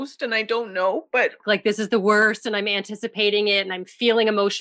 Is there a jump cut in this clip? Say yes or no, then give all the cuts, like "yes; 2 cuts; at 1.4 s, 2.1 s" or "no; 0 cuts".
yes; 1 cut; at 1.4 s